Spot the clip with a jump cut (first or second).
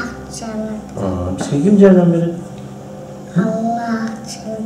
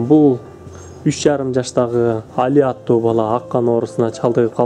second